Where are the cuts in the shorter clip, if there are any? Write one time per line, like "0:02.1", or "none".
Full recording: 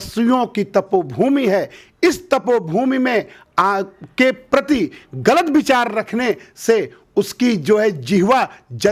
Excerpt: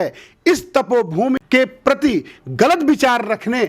0:01.4